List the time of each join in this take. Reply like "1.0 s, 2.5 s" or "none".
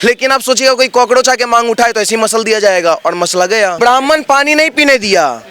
3.7 s